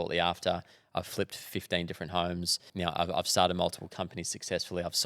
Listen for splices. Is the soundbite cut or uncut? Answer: cut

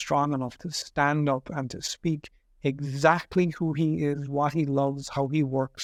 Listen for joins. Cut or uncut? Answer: uncut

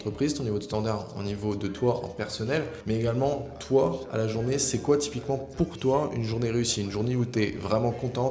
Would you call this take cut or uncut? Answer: uncut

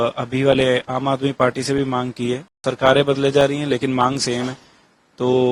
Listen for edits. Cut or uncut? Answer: cut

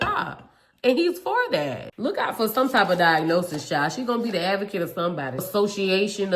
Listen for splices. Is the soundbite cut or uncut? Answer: cut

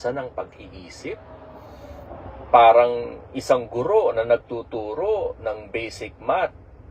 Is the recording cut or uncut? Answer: uncut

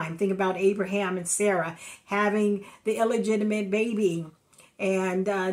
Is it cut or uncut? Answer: uncut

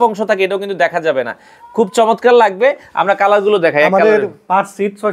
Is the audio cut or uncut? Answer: uncut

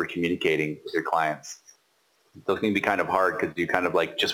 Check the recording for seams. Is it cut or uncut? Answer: uncut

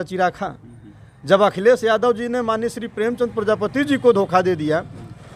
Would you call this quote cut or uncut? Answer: uncut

